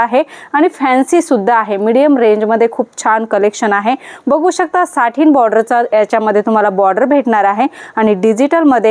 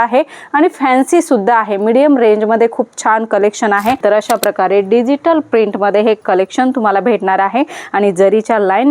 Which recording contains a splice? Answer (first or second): second